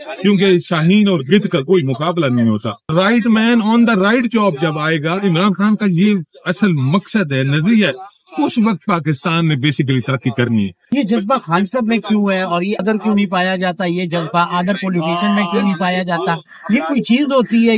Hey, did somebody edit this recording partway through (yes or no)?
yes